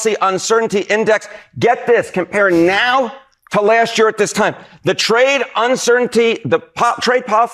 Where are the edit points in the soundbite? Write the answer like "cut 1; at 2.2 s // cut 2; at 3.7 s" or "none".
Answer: none